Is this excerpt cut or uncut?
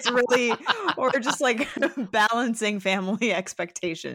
uncut